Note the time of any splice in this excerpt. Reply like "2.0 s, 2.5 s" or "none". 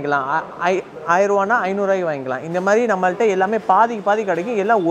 none